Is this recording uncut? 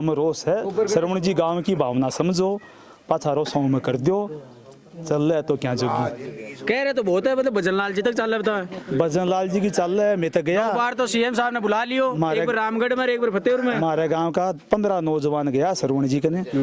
yes; 0 cuts

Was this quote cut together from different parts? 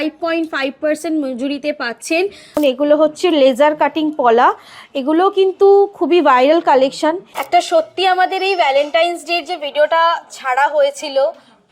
yes; 2 cuts; at 2.6 s, 7.3 s

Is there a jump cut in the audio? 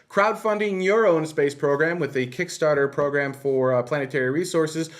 yes; 1 cut; at 1.0 s

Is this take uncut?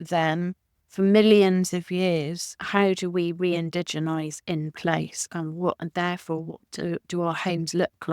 no; 1 cut; at 2.5 s

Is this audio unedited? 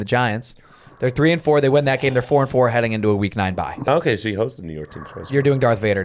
no; 1 cut; at 3.9 s

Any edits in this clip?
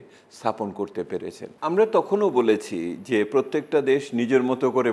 yes; 1 cut; at 1.4 s

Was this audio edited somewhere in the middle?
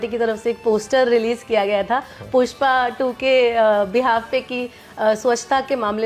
no; 0 cuts

